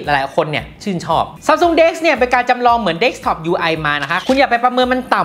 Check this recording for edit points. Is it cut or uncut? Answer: cut